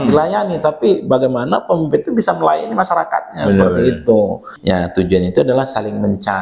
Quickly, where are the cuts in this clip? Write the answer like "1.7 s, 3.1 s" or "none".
4.5 s